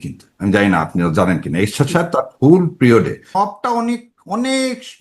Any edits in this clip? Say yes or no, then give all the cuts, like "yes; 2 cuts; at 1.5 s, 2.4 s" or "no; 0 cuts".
yes; 1 cut; at 3.3 s